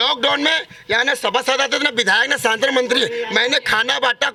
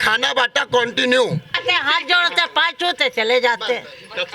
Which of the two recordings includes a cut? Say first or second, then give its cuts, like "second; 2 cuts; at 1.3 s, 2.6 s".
second; 1 cut; at 1.6 s